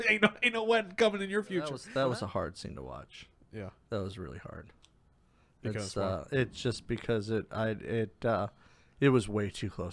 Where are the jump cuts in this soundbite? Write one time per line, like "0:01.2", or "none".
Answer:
0:01.8